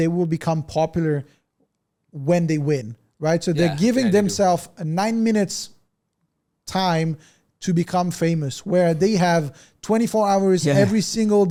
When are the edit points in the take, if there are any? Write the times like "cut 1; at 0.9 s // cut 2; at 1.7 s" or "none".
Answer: none